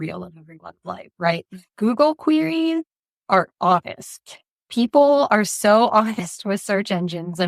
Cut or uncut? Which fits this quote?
uncut